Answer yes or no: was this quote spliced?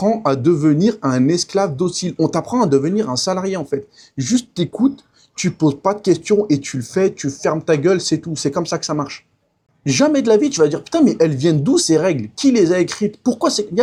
no